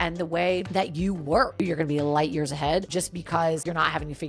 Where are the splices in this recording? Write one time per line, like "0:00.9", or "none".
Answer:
0:01.6